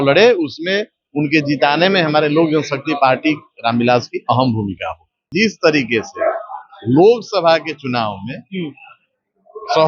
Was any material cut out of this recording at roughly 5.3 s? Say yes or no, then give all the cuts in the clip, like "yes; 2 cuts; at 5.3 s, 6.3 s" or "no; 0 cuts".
yes; 1 cut; at 5.3 s